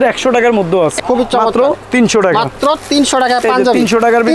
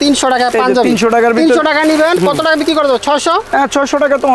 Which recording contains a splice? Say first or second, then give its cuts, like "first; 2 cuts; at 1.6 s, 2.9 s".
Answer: first; 1 cut; at 1.0 s